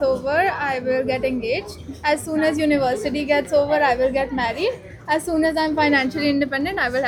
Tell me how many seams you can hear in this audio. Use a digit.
0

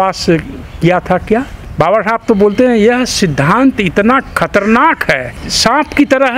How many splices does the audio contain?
2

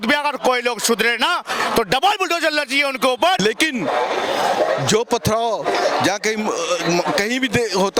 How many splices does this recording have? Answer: 1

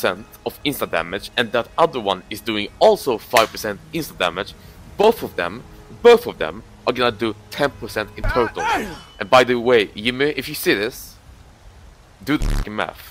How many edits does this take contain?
0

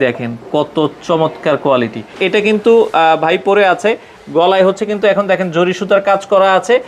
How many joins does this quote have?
1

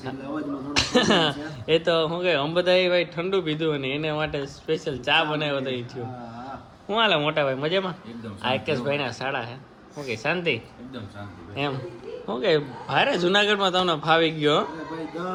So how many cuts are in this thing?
0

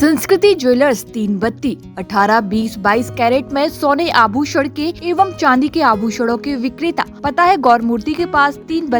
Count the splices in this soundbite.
2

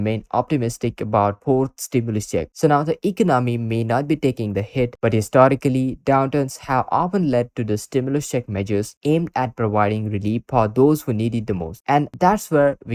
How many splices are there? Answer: 0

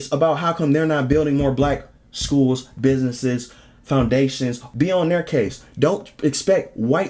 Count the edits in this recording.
1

